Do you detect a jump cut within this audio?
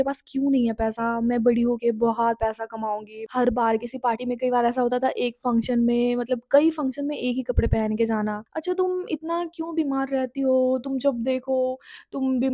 yes; 2 cuts; at 3.2 s, 8.5 s

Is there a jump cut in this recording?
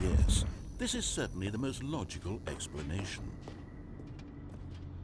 yes; 1 cut; at 3.2 s

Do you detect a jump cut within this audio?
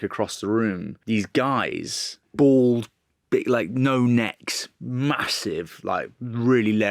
yes; 2 cuts; at 0.9 s, 2.2 s

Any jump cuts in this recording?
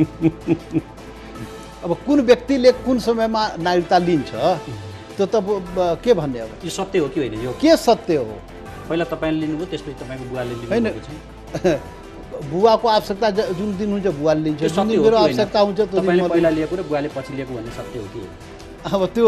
no; 0 cuts

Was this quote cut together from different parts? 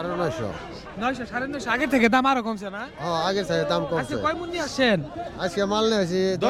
no; 0 cuts

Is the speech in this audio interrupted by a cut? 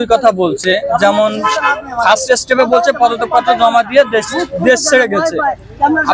no; 0 cuts

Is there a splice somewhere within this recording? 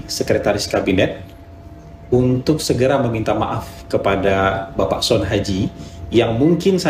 no; 0 cuts

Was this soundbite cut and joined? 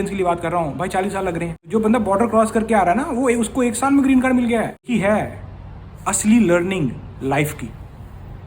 yes; 2 cuts; at 1.7 s, 4.9 s

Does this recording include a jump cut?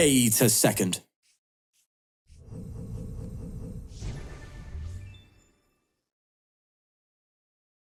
no; 0 cuts

